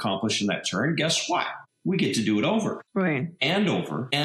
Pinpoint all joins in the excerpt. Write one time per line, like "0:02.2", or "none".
0:02.8